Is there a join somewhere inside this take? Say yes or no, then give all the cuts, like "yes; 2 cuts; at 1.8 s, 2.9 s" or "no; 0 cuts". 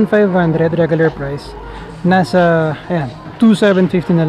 no; 0 cuts